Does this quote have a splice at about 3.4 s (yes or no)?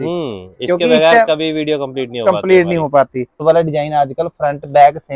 yes